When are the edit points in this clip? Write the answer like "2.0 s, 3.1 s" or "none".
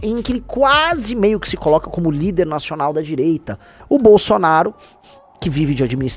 none